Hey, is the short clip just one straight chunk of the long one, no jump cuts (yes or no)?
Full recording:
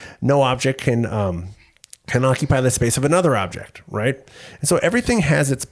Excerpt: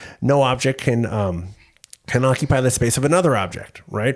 yes